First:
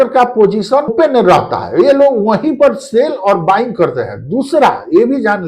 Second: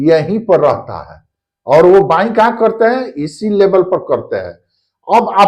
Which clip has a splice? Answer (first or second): first